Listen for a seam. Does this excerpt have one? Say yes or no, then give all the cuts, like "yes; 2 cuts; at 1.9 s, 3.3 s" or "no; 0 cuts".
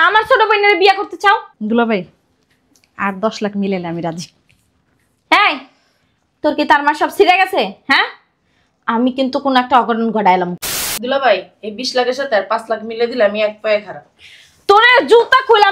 yes; 2 cuts; at 1.5 s, 10.5 s